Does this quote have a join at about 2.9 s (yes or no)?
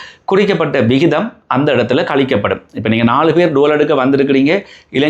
no